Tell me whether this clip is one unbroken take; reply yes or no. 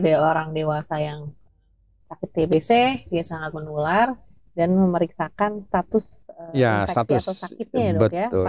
yes